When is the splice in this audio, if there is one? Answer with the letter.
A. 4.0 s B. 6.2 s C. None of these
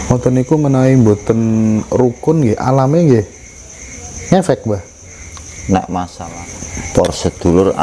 B